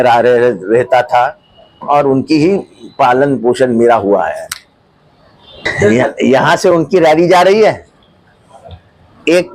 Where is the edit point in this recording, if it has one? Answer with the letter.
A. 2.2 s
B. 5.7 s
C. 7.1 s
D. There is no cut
B